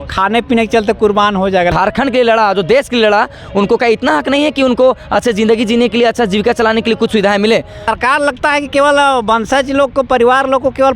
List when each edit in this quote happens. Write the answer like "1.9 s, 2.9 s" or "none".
1.7 s, 7.8 s